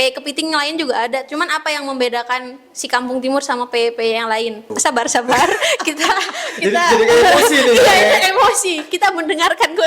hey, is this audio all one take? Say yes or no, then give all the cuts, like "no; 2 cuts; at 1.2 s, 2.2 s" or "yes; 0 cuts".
no; 1 cut; at 4.7 s